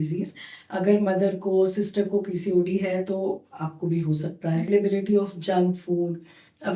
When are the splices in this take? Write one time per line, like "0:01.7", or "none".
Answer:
0:04.7